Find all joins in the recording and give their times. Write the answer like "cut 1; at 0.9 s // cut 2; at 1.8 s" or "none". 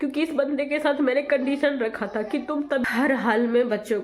cut 1; at 2.8 s